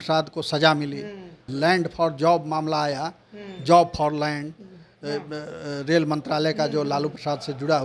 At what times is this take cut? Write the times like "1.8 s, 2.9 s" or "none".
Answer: 1.4 s